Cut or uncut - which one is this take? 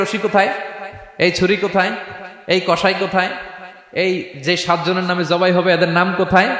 uncut